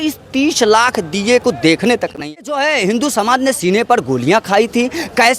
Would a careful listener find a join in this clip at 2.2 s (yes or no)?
yes